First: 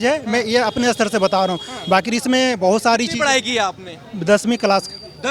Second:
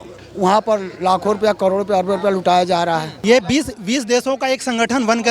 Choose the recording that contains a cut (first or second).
second